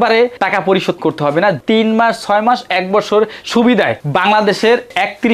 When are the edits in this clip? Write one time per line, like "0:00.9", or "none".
0:01.6